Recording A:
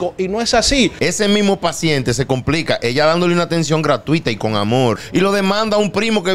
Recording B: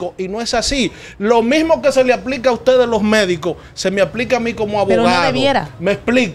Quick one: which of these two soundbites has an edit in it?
A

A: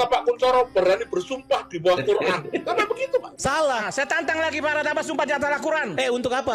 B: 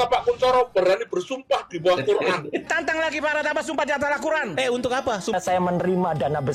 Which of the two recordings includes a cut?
B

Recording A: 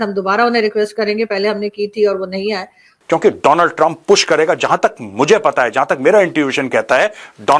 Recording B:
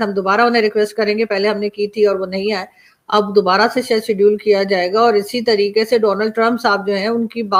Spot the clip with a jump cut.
A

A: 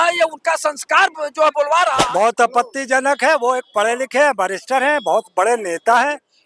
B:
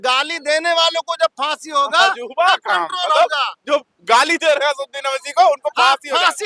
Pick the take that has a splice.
A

